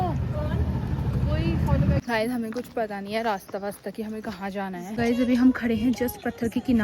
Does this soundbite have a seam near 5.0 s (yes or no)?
yes